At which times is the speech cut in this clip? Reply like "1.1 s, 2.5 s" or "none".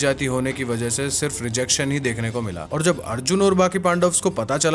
2.6 s